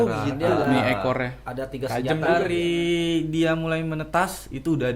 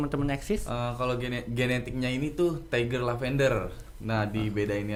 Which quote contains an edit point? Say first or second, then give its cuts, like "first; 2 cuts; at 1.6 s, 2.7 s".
first; 1 cut; at 2.2 s